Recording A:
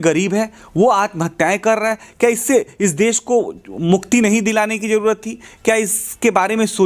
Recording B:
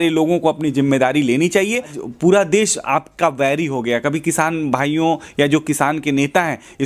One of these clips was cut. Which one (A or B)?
B